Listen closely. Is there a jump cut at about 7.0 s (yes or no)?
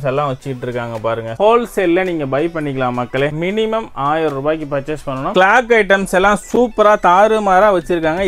no